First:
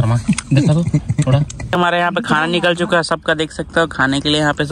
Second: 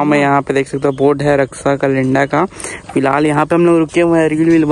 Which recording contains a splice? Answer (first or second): first